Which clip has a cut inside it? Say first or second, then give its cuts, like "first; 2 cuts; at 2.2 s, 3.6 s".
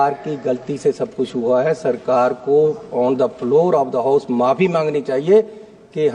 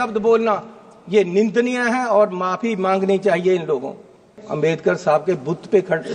second; 1 cut; at 4.4 s